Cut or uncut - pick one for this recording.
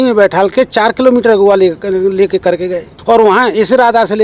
cut